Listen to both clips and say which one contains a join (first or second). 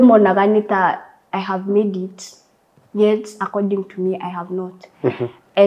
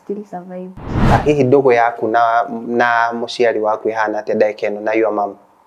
second